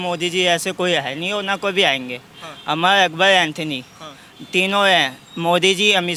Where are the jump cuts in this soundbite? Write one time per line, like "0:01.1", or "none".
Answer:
none